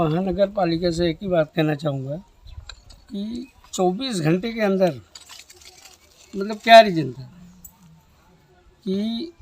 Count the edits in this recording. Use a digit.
0